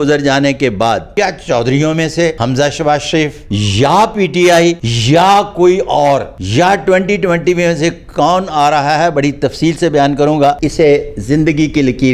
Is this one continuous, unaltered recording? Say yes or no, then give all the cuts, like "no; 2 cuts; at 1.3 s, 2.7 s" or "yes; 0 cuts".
no; 6 cuts; at 1.1 s, 2.4 s, 3.4 s, 4.9 s, 6.4 s, 10.6 s